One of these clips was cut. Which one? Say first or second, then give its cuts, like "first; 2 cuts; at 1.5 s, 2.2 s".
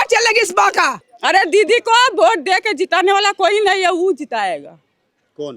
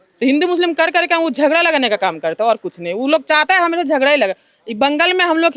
first; 1 cut; at 1.1 s